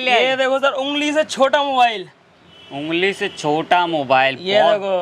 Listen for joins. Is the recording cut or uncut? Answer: uncut